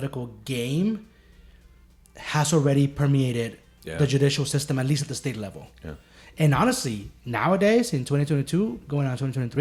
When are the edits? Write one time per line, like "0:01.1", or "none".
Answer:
none